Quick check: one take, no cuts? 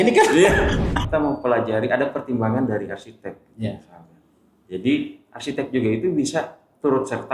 no; 1 cut; at 1.0 s

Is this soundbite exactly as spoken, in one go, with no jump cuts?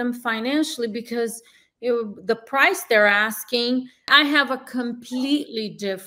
no; 1 cut; at 4.1 s

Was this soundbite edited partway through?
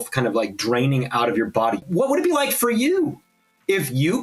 yes; 1 cut; at 1.8 s

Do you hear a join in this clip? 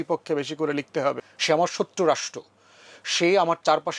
yes; 1 cut; at 1.2 s

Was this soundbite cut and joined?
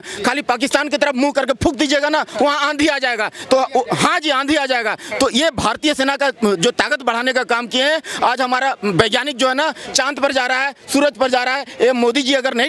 no; 0 cuts

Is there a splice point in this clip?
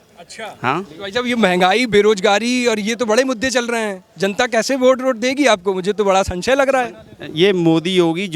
no; 0 cuts

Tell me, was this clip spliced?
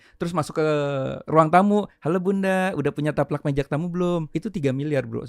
yes; 2 cuts; at 1.2 s, 4.3 s

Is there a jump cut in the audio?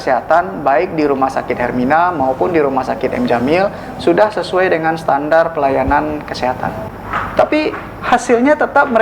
yes; 1 cut; at 6.8 s

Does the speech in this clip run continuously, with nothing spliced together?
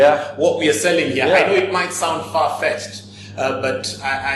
yes; 0 cuts

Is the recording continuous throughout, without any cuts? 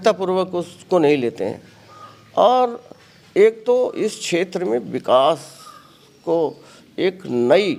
yes; 0 cuts

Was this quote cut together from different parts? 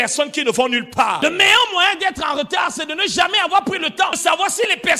yes; 2 cuts; at 1.2 s, 4.2 s

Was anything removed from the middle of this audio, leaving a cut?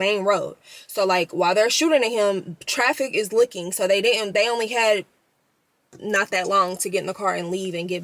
no; 0 cuts

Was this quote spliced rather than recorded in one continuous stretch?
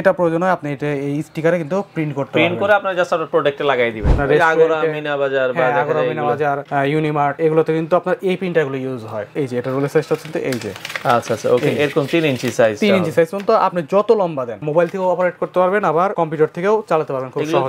yes; 5 cuts; at 4.1 s, 7.4 s, 9.4 s, 14.7 s, 16.1 s

